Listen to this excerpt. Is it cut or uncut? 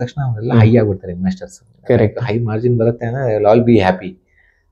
uncut